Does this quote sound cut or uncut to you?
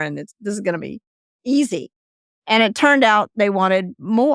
uncut